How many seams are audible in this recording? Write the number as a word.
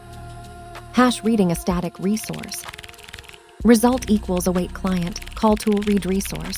one